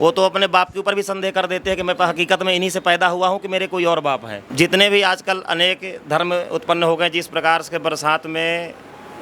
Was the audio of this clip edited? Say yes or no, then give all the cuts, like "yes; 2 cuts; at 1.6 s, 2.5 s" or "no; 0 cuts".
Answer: yes; 1 cut; at 4.4 s